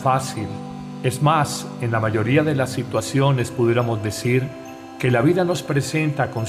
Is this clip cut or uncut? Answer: uncut